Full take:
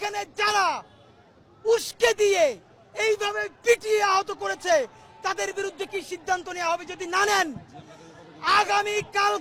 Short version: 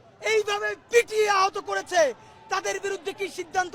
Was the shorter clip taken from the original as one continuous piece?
yes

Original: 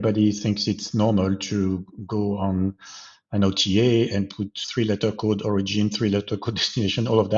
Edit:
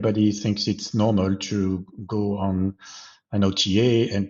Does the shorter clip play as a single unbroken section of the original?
yes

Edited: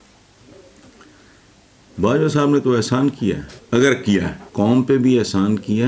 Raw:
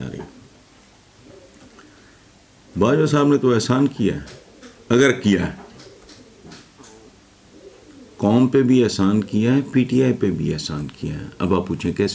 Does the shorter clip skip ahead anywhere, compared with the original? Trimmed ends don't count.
yes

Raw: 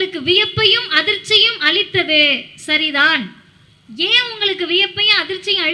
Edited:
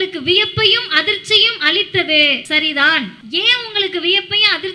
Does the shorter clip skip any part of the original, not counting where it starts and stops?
yes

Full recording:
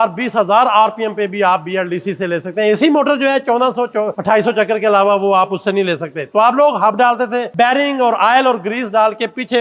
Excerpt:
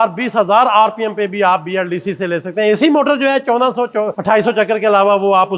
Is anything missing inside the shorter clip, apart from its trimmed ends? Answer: no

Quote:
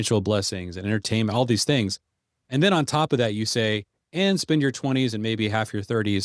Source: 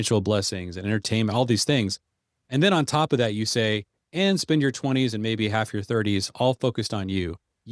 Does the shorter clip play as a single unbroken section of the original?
yes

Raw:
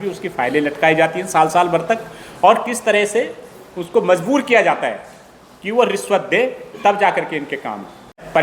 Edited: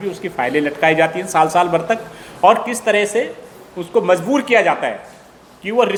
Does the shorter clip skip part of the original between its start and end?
no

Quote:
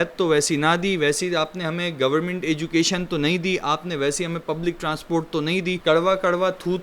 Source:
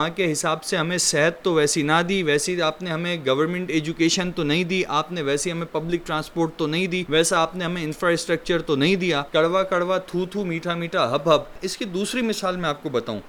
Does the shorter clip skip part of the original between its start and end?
yes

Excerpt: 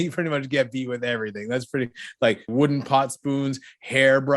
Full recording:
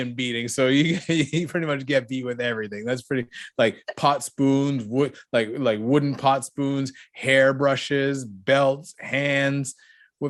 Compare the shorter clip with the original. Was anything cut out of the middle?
yes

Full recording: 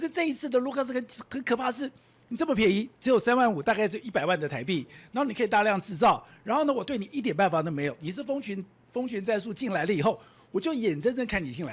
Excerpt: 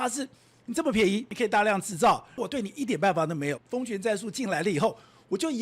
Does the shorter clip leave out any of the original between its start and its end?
yes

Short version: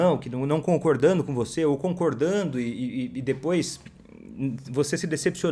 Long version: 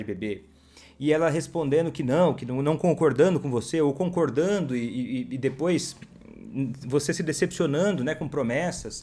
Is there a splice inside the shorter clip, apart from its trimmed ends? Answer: no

